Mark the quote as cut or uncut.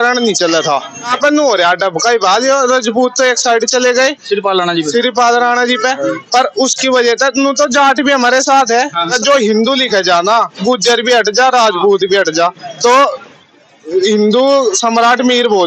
cut